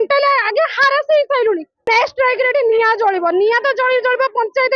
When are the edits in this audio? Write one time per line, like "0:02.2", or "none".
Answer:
0:01.9